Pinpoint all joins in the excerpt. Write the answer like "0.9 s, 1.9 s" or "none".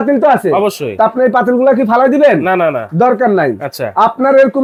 none